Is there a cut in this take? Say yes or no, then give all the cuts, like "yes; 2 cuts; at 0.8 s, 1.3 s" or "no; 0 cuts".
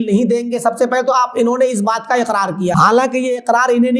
yes; 1 cut; at 2.7 s